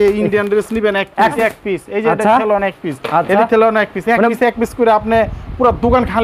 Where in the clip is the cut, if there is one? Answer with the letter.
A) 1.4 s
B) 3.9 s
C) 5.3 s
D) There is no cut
A